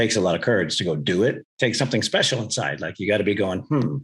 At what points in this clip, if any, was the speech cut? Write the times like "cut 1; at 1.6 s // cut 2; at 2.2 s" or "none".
cut 1; at 1.5 s